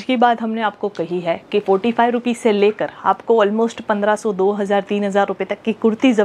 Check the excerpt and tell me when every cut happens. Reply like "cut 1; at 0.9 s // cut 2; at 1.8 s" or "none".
none